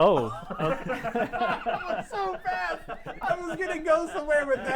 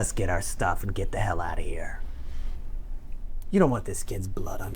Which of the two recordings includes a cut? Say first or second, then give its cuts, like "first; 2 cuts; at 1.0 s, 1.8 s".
second; 1 cut; at 3.4 s